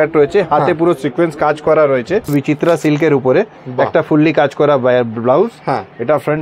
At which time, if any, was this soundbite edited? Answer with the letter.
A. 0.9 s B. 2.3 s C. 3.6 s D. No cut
B